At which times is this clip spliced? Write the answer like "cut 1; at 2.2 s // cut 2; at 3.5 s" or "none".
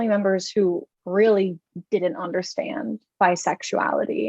cut 1; at 0.9 s